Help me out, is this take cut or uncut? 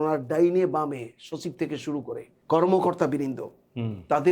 cut